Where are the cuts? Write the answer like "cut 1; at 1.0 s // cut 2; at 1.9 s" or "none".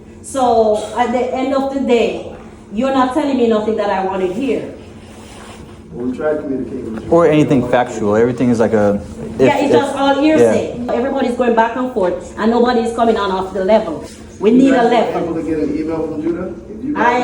cut 1; at 10.9 s